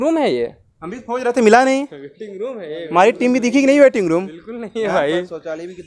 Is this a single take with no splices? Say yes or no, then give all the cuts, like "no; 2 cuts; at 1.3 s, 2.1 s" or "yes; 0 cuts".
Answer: yes; 0 cuts